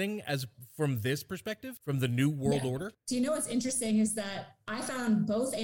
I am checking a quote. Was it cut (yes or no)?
yes